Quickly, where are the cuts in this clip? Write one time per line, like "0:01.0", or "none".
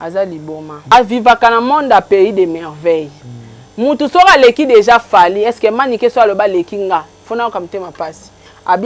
0:00.9

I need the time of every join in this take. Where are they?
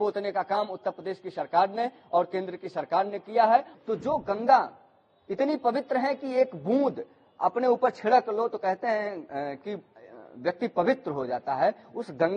0:03.7

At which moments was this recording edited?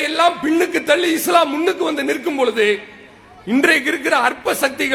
none

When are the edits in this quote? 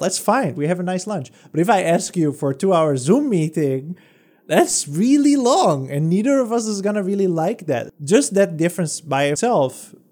0:07.9

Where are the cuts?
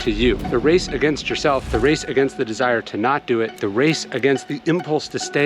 0:01.7
0:03.5

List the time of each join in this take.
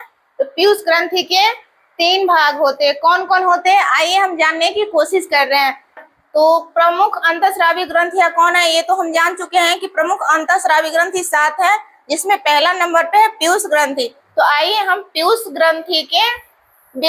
0:05.9
0:14.2

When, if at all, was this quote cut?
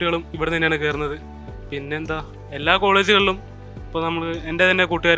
none

